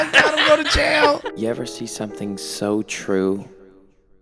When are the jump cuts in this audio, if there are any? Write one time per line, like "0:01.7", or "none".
0:01.3